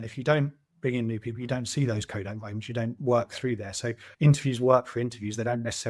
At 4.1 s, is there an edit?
yes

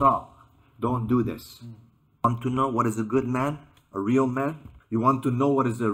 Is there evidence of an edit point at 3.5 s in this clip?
no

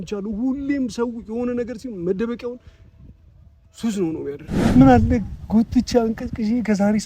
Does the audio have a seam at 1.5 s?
no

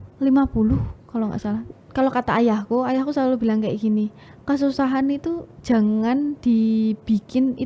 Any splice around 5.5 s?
no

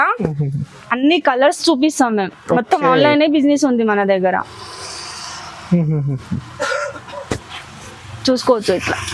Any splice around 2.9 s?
no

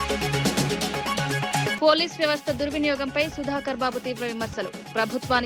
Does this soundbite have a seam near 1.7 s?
no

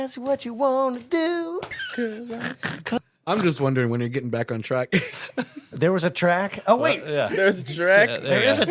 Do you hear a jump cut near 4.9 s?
no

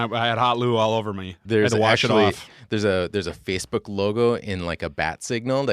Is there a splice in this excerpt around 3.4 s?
no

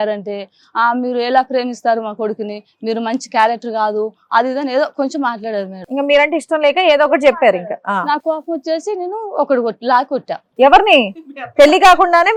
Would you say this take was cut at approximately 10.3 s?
no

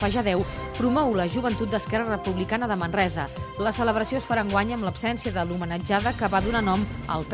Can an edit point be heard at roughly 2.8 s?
yes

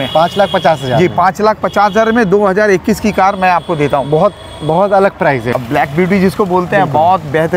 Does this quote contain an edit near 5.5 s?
yes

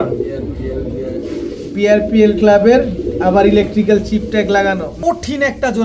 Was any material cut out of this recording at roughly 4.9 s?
yes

